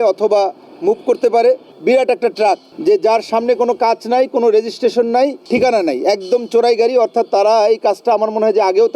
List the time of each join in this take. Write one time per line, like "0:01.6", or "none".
0:01.7
0:02.7
0:05.4